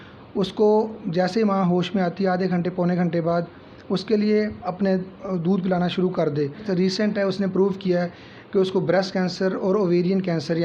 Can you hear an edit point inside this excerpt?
yes; 1 cut; at 6.7 s

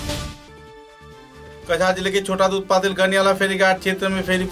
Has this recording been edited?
yes; 1 cut; at 1.5 s

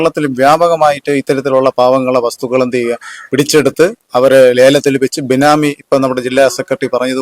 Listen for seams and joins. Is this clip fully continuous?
yes; 0 cuts

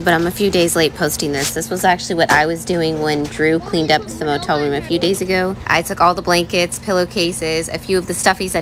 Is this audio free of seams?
yes; 0 cuts

